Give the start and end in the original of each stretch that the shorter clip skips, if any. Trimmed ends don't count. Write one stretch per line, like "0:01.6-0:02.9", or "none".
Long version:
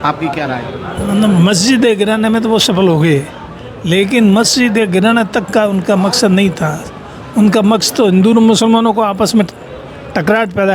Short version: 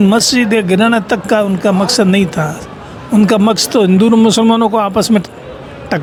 none